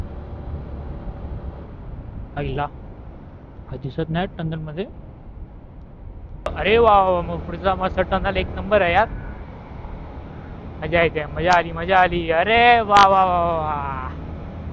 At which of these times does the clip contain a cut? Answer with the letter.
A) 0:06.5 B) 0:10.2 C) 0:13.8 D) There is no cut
A